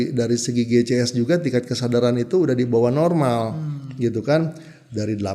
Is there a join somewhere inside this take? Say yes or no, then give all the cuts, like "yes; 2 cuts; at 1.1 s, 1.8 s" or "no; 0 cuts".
no; 0 cuts